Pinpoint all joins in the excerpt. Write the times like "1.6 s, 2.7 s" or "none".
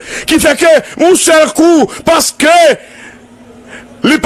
none